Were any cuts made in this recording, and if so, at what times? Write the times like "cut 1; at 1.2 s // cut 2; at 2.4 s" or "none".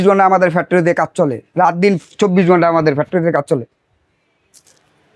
none